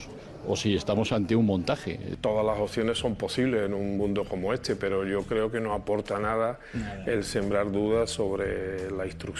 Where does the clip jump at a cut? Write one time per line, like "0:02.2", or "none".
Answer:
0:02.0